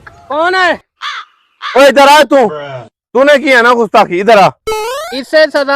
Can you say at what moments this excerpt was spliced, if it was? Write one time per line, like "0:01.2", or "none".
0:04.6